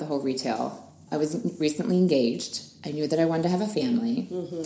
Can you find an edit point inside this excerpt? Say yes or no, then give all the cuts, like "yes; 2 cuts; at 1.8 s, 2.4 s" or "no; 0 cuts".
yes; 1 cut; at 1.0 s